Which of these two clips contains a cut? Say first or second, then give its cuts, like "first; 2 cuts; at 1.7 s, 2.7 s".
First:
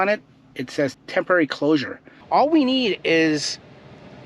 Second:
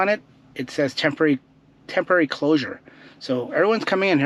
first; 2 cuts; at 1.0 s, 2.2 s